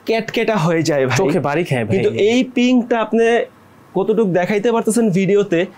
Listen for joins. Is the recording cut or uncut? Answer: uncut